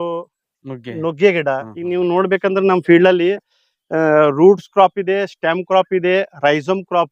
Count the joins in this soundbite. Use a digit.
1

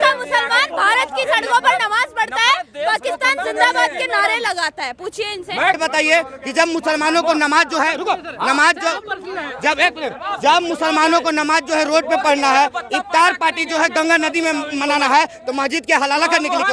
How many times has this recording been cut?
1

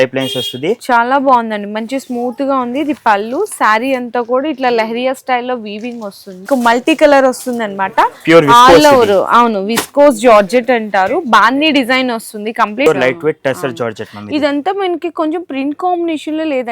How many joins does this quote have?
2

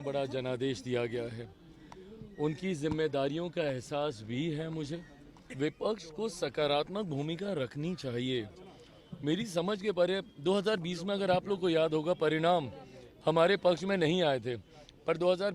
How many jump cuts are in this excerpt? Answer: 1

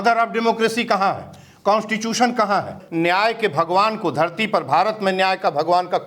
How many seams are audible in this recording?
1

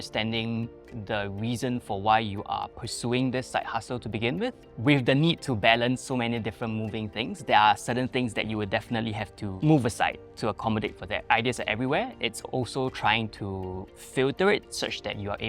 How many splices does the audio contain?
3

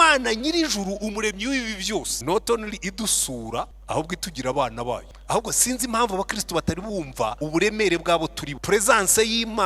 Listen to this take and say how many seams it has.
5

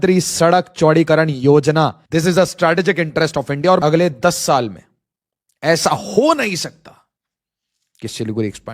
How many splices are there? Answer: 2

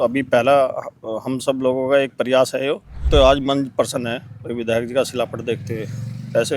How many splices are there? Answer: 1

